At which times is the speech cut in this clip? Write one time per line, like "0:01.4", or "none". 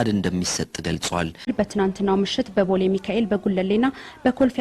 0:01.5